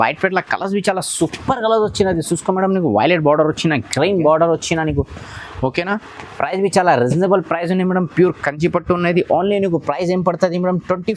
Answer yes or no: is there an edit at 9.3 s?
no